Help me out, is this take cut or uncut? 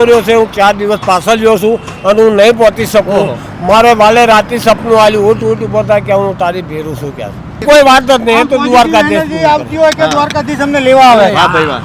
cut